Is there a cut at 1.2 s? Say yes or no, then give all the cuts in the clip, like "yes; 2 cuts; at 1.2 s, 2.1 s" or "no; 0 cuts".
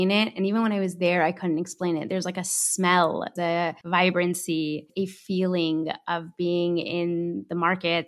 no; 2 cuts; at 3.5 s, 4.9 s